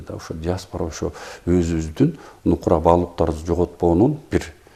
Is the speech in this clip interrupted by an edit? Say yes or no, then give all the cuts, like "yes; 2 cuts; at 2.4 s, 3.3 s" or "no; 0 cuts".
no; 0 cuts